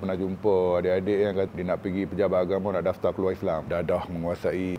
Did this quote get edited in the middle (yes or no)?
yes